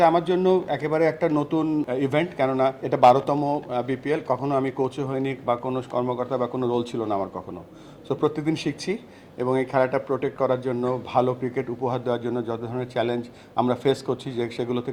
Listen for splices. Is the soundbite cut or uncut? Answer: cut